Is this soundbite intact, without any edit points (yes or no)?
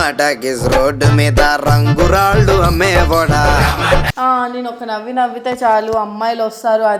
no